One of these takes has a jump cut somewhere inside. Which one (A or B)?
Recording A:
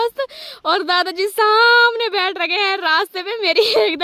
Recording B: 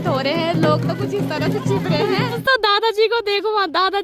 B